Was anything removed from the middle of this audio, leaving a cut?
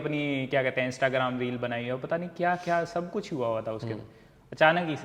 no; 0 cuts

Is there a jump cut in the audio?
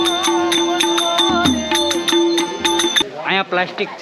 no; 0 cuts

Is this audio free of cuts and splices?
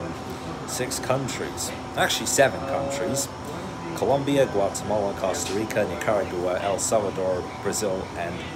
yes; 0 cuts

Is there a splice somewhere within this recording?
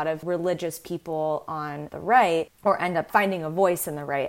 no; 0 cuts

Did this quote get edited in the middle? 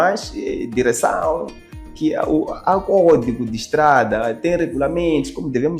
no; 0 cuts

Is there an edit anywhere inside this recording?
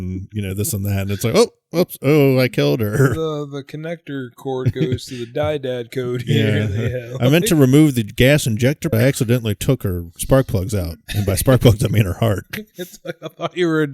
yes; 1 cut; at 8.9 s

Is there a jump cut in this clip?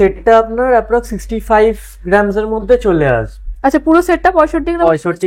no; 0 cuts

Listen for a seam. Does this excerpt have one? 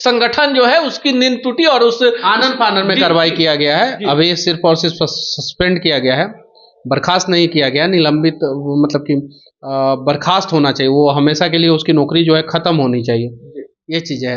no; 0 cuts

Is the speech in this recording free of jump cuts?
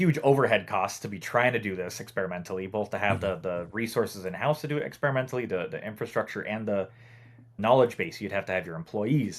no; 1 cut; at 7.6 s

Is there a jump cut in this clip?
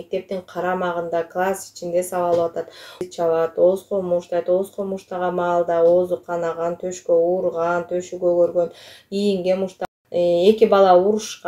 yes; 2 cuts; at 3.0 s, 9.9 s

